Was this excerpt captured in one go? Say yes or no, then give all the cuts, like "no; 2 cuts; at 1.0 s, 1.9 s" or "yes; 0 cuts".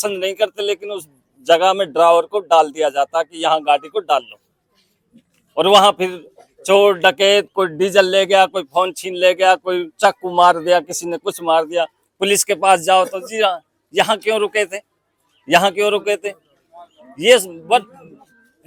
yes; 0 cuts